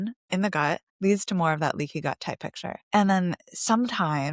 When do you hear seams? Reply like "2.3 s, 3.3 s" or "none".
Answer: 0.9 s, 2.7 s